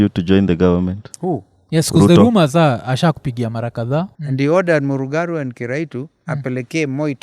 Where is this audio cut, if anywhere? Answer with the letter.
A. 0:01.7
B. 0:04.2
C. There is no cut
B